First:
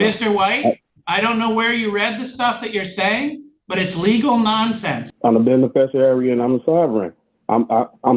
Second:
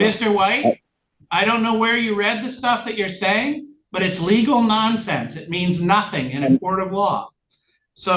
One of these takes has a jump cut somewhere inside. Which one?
first; 2 cuts; at 0.9 s, 5.1 s

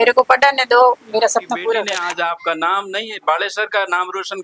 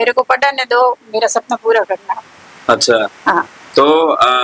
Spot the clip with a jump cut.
first; 1 cut; at 1.9 s

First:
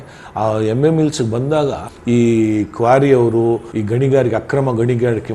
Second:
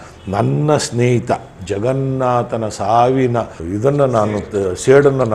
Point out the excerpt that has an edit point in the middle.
first; 1 cut; at 1.9 s

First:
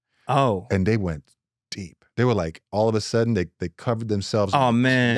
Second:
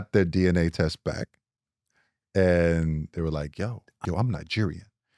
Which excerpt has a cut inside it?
second; 1 cut; at 4.0 s

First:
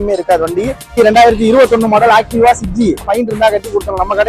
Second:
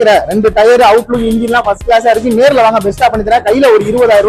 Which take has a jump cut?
first; 2 cuts; at 1.0 s, 3.1 s

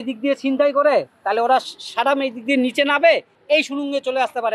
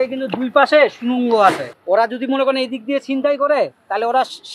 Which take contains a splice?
second; 1 cut; at 1.7 s

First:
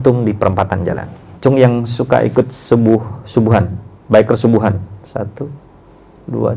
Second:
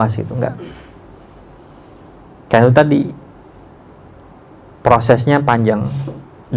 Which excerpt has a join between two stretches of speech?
first; 1 cut; at 1.3 s

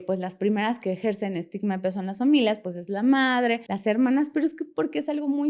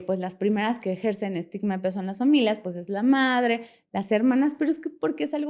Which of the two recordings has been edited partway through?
first; 1 cut; at 3.7 s

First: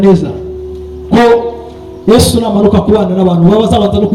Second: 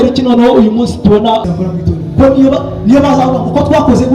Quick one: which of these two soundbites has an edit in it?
second; 1 cut; at 1.5 s

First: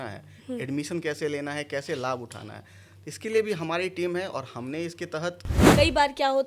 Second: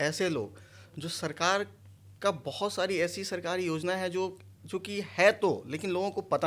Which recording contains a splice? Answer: first; 1 cut; at 5.6 s

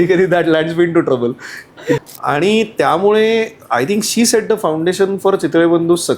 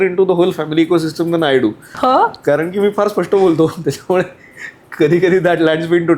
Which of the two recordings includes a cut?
first; 1 cut; at 2.0 s

